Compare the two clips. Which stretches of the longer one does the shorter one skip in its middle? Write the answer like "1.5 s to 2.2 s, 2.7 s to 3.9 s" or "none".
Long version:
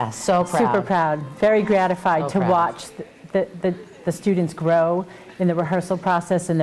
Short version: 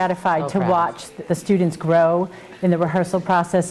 2.9 s to 3.9 s